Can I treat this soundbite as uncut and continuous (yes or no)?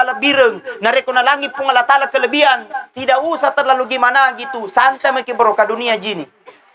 yes